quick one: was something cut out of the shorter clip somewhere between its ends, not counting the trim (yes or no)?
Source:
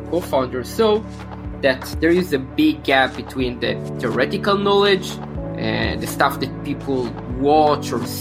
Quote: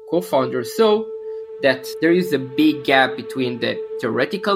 no